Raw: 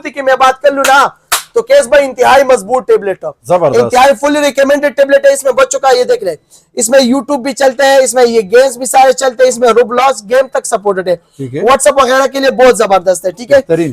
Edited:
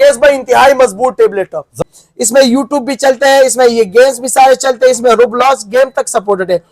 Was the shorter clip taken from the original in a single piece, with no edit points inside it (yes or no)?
no